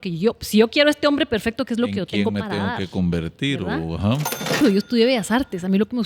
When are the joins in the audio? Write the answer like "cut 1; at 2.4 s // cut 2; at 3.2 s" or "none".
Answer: cut 1; at 4.6 s